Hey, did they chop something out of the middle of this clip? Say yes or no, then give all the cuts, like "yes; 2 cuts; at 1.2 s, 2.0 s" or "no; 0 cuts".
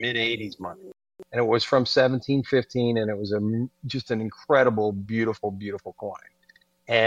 yes; 1 cut; at 1.0 s